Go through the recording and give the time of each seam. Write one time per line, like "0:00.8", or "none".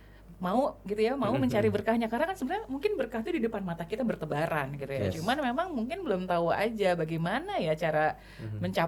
none